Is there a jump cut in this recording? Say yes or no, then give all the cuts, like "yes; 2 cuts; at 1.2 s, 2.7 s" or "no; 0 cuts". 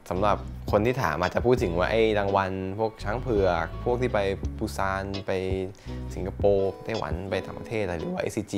no; 0 cuts